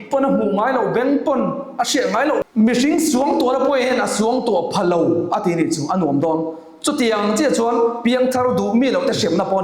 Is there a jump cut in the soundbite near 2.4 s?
yes; 1 cut; at 2.4 s

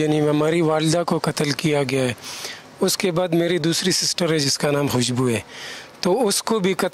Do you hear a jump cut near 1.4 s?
no; 0 cuts

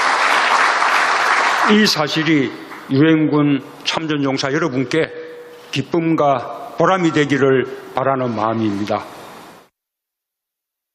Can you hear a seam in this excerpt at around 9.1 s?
no; 1 cut; at 2.6 s

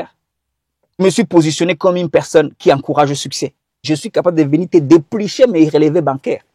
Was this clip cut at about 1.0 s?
yes; 2 cuts; at 1.0 s, 3.8 s

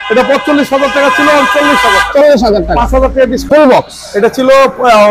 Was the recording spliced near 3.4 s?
yes; 1 cut; at 3.4 s

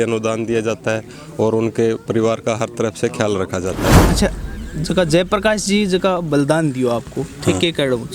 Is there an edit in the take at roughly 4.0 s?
yes; 1 cut; at 4.0 s

